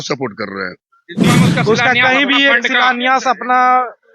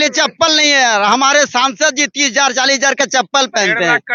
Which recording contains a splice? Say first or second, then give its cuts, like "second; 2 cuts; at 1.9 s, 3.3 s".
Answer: first; 1 cut; at 1.3 s